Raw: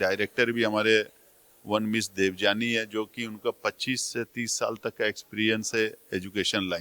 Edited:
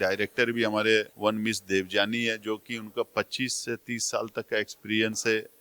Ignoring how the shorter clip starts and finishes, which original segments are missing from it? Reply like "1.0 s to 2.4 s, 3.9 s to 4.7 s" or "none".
1.1 s to 1.6 s